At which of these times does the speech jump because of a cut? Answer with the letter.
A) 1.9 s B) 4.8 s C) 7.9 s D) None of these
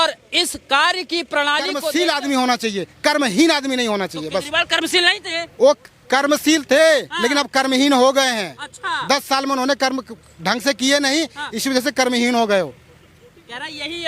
A